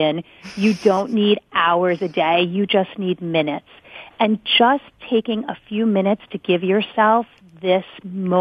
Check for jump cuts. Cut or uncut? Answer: uncut